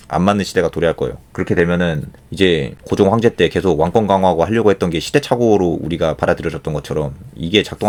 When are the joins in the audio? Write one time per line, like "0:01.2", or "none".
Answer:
none

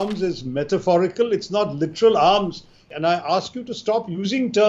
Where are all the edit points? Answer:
0:02.8

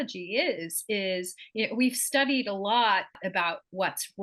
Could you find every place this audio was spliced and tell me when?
0:03.1

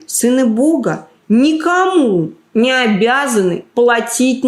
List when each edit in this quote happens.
none

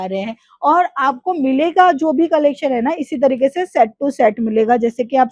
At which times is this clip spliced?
none

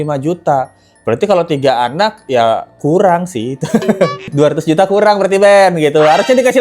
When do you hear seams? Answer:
0:04.3

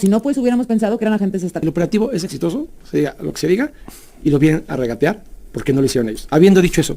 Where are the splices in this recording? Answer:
0:01.6

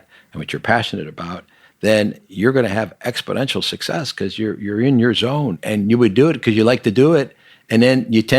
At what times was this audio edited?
0:05.6

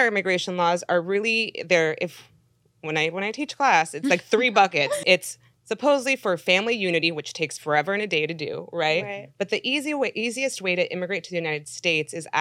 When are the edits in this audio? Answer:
0:05.0

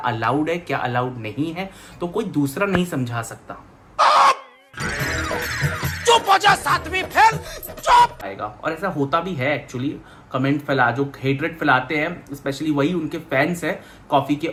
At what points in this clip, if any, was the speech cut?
none

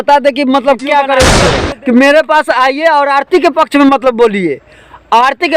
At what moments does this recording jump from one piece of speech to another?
0:01.3

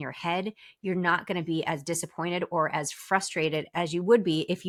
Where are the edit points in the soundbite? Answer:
none

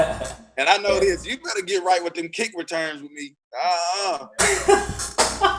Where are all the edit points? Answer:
none

